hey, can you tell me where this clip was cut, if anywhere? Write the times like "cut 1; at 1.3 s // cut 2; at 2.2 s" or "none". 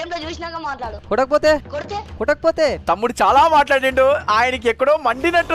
cut 1; at 1.0 s // cut 2; at 2.8 s